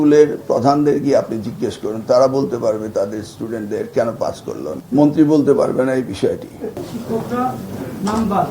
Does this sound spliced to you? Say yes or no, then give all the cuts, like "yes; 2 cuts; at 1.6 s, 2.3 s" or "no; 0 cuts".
yes; 2 cuts; at 4.7 s, 6.9 s